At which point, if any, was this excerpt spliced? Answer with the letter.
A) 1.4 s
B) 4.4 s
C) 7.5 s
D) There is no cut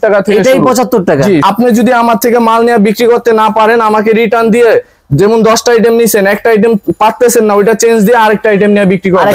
A